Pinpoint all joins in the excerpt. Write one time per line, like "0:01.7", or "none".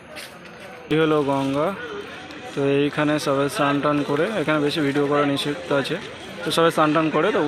0:00.9